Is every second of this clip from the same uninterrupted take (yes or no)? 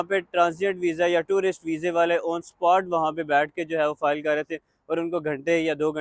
yes